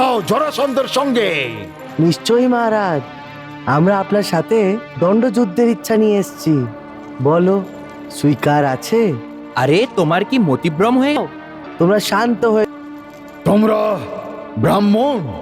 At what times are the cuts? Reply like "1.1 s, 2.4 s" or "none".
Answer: 11.2 s, 12.7 s